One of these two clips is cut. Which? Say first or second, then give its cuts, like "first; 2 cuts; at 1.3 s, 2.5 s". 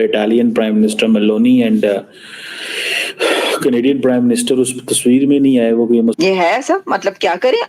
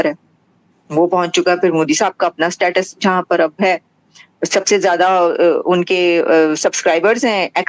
first; 1 cut; at 6.2 s